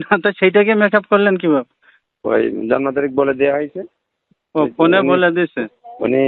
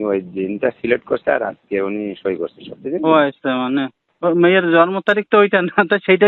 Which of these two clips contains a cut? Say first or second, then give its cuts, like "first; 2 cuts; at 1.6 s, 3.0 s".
second; 1 cut; at 4.0 s